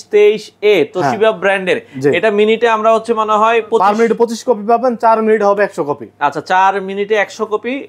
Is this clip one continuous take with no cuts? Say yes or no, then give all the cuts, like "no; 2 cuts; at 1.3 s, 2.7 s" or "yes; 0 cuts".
yes; 0 cuts